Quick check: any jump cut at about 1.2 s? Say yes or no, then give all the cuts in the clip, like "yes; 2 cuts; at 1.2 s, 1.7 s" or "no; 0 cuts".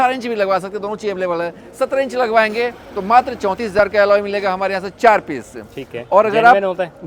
no; 0 cuts